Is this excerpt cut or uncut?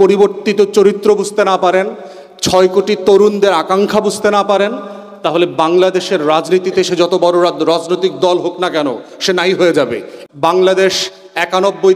cut